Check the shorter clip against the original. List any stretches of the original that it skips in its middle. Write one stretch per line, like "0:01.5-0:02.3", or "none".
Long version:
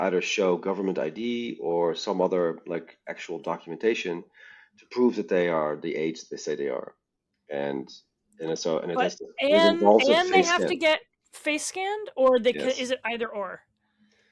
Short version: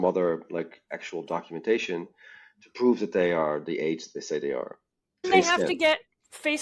0:07.4-0:10.3